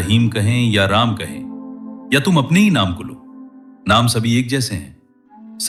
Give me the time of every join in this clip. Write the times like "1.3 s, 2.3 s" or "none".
none